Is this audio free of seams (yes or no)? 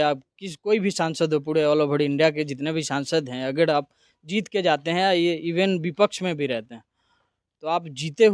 yes